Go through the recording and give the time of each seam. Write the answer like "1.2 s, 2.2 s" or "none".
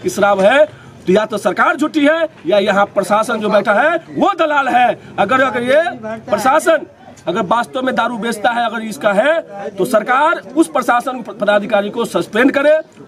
none